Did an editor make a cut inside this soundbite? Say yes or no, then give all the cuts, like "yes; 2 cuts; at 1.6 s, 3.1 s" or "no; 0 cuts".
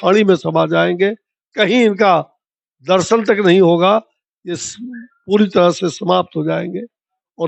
no; 0 cuts